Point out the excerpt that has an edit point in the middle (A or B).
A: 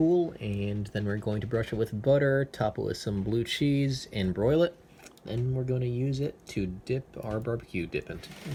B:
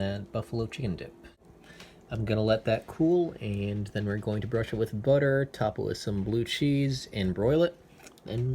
B